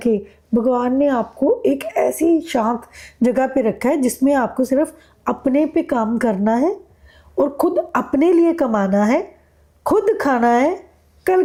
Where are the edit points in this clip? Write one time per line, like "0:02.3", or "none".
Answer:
none